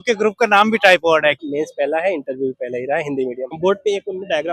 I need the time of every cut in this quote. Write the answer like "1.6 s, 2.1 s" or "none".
1.4 s, 3.5 s